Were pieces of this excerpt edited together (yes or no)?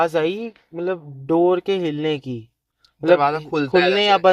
no